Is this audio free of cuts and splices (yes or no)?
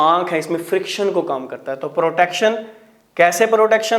yes